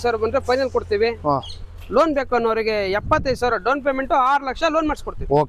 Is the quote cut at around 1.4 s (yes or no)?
no